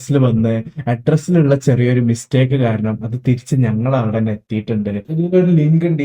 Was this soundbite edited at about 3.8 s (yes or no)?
no